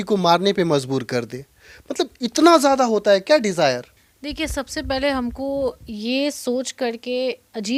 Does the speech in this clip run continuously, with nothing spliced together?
yes; 0 cuts

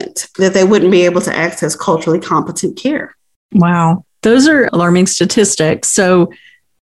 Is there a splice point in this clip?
yes; 1 cut; at 4.1 s

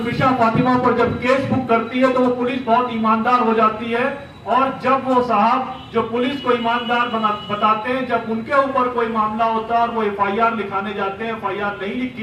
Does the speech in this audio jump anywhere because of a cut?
no; 0 cuts

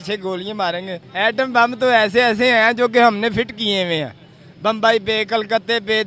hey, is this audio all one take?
no; 1 cut; at 1.0 s

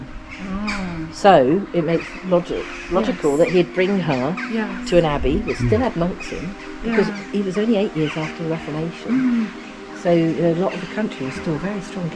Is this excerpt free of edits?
yes; 0 cuts

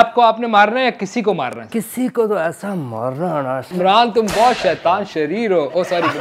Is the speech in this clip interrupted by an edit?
yes; 2 cuts; at 1.6 s, 3.7 s

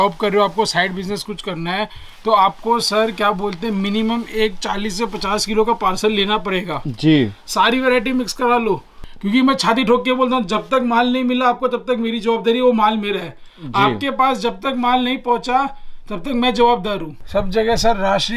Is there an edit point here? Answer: yes; 2 cuts; at 9.0 s, 17.1 s

